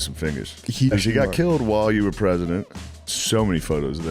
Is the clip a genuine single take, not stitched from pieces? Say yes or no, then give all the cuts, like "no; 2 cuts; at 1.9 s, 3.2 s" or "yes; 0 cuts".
no; 2 cuts; at 0.9 s, 3.1 s